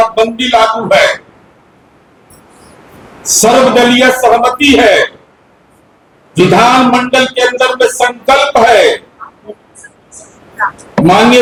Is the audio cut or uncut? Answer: uncut